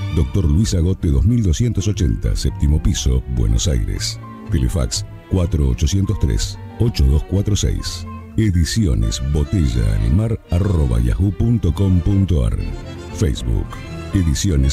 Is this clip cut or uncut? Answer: uncut